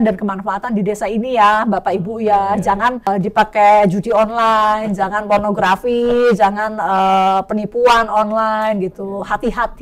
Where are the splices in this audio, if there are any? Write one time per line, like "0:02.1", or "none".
0:03.1